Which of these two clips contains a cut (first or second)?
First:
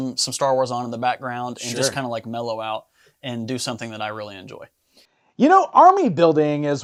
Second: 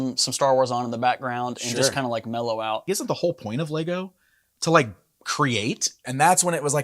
second